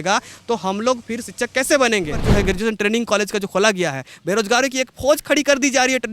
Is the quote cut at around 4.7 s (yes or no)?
no